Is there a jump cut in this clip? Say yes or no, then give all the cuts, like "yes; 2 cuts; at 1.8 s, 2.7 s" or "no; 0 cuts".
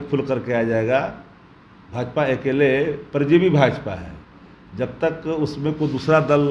no; 0 cuts